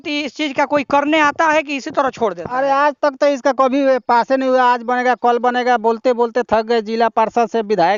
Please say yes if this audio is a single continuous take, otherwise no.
yes